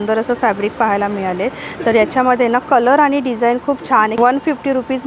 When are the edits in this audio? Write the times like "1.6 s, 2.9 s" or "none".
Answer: 4.2 s